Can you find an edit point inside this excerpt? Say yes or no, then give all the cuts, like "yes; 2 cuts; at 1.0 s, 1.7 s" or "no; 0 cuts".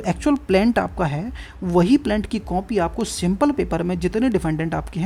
no; 0 cuts